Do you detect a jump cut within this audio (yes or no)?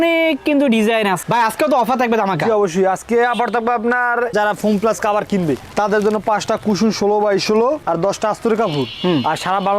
yes